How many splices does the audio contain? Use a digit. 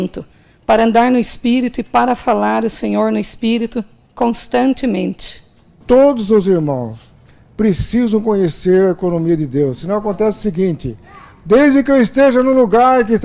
1